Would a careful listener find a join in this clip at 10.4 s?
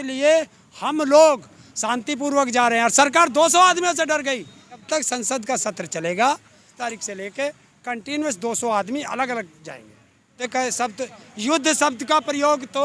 yes; 3 cuts; at 4.8 s, 6.7 s, 10.4 s

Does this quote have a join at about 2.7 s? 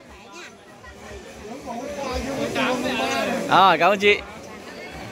no; 0 cuts

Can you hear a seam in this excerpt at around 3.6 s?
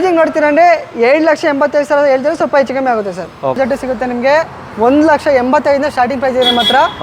yes; 1 cut; at 3.6 s

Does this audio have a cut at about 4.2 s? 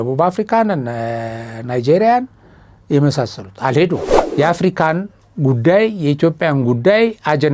yes; 1 cut; at 4.2 s

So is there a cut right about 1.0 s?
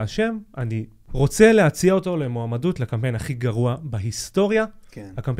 yes; 1 cut; at 1.0 s

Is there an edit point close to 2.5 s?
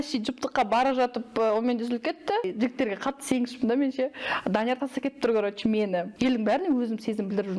yes; 2 cuts; at 2.5 s, 6.1 s

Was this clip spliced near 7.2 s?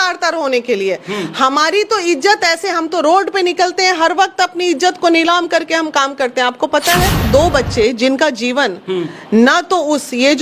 yes; 1 cut; at 7.2 s

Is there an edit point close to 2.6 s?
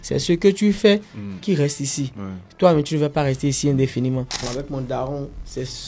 no; 1 cut; at 4.5 s

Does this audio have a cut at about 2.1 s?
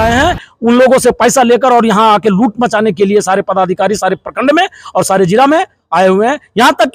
no; 0 cuts

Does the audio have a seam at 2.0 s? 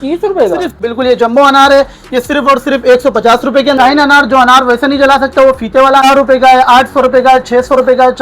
no; 3 cuts; at 0.8 s, 3.8 s, 6.0 s

